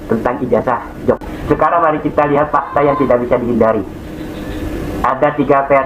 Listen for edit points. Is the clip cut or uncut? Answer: uncut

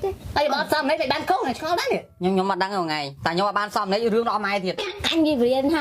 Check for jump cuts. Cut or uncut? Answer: cut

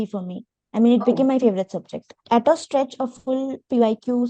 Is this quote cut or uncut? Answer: cut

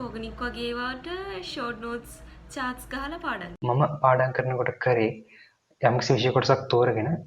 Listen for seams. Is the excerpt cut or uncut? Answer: cut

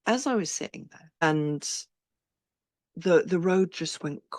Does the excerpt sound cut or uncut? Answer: cut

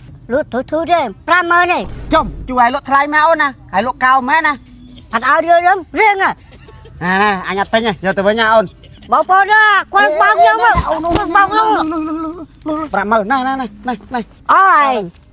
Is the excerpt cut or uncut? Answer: cut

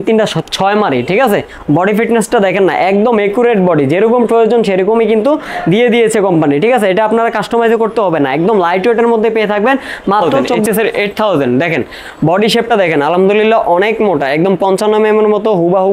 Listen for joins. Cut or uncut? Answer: cut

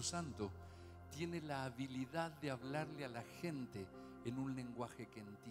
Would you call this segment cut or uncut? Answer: uncut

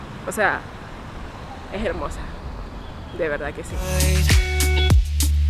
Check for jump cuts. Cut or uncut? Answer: cut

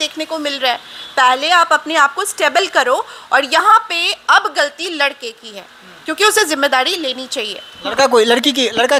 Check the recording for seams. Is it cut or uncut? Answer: uncut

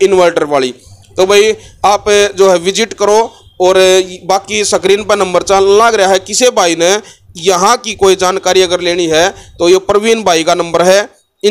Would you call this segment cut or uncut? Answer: uncut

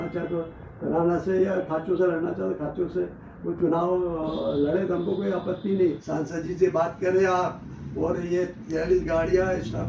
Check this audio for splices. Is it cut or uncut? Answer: cut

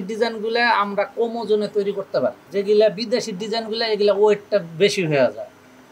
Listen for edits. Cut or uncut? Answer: uncut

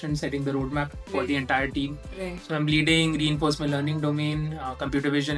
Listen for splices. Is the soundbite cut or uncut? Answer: uncut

